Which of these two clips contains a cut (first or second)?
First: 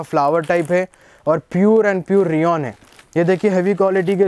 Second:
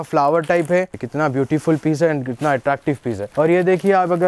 second